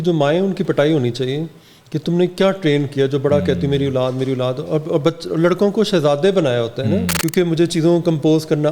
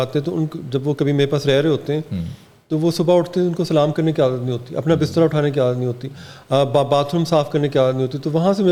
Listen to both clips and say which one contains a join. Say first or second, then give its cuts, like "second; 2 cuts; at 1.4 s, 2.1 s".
first; 1 cut; at 7.2 s